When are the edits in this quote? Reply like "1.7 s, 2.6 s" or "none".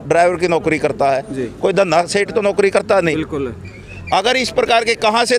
none